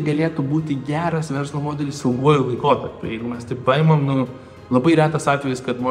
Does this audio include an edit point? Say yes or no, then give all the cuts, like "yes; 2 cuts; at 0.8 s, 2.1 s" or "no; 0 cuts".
no; 0 cuts